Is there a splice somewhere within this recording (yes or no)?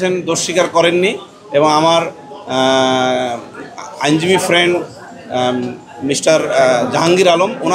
no